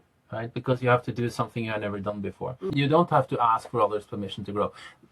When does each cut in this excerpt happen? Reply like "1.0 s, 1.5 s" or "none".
2.7 s